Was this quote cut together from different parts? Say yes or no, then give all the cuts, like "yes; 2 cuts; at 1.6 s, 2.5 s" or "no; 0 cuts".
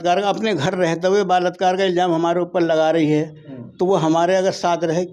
no; 0 cuts